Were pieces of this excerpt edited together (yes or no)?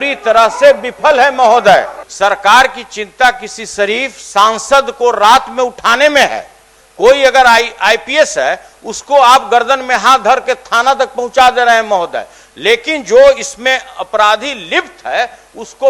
yes